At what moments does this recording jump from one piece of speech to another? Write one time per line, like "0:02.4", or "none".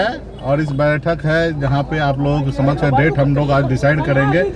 none